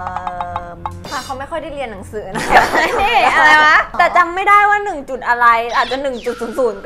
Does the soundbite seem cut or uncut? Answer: cut